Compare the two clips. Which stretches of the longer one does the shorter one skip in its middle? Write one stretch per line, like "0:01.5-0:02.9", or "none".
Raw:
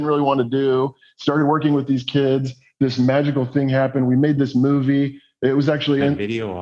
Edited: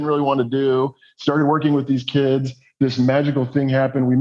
none